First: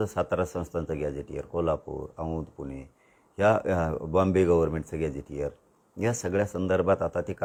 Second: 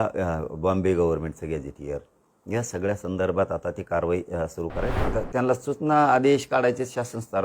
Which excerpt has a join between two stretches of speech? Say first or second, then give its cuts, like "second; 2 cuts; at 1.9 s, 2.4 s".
second; 1 cut; at 4.9 s